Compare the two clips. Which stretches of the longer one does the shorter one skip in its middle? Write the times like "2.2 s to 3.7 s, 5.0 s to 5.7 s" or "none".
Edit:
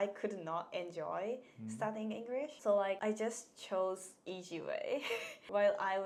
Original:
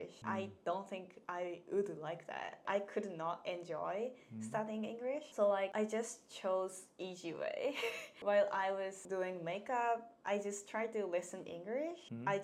none